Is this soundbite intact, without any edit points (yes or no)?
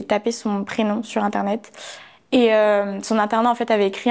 yes